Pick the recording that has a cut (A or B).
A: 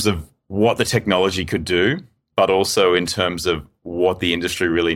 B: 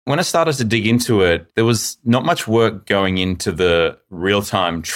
B